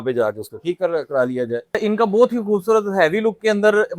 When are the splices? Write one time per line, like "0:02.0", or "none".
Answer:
0:01.8